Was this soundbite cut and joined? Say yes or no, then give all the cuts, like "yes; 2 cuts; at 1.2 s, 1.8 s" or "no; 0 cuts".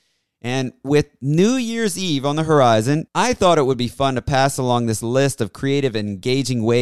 yes; 1 cut; at 3.0 s